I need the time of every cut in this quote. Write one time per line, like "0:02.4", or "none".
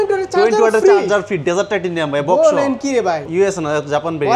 0:03.3